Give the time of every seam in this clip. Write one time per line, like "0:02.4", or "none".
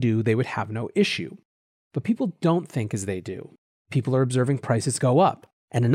none